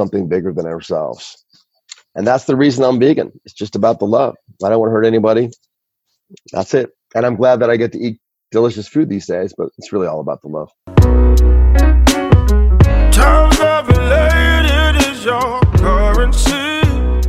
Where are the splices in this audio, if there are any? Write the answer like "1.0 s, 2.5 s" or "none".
10.8 s